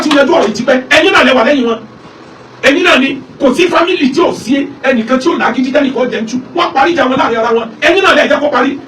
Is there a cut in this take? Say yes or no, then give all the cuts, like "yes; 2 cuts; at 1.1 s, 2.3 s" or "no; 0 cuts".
no; 0 cuts